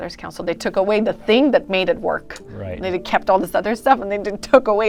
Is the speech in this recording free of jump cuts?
yes; 0 cuts

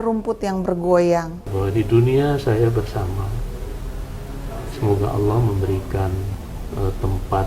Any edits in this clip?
yes; 1 cut; at 1.5 s

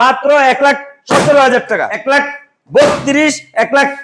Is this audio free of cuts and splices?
no; 1 cut; at 1.9 s

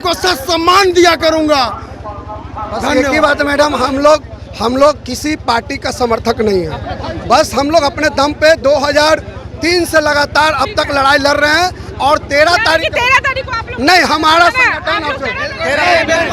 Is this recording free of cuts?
yes; 0 cuts

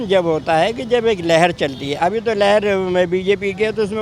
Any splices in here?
no; 0 cuts

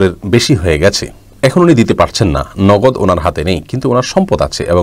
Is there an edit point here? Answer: no; 0 cuts

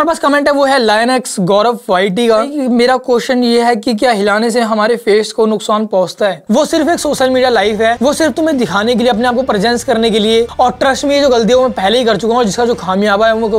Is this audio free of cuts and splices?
no; 4 cuts; at 2.5 s, 6.4 s, 8.0 s, 10.5 s

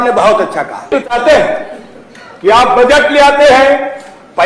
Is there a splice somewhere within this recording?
yes; 1 cut; at 1.0 s

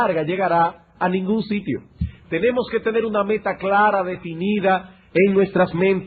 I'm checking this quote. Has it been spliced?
no; 0 cuts

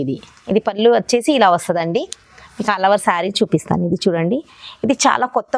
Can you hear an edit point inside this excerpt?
no; 0 cuts

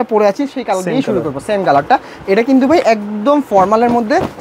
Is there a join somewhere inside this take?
no; 0 cuts

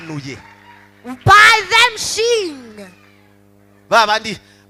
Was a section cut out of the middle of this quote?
no; 0 cuts

